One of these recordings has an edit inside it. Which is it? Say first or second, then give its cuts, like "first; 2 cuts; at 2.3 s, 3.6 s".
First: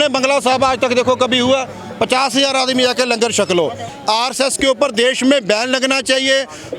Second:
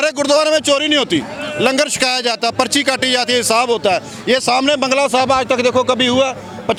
first; 1 cut; at 3.9 s